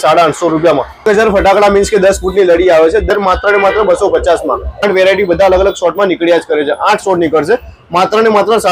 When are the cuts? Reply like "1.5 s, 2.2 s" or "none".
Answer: 1.0 s, 3.1 s, 4.8 s